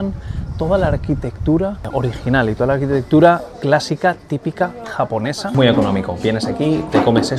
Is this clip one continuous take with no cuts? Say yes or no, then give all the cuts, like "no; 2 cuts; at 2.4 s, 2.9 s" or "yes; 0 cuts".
no; 1 cut; at 5.4 s